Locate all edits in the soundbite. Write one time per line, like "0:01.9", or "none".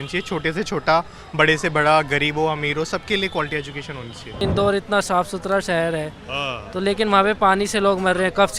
0:04.4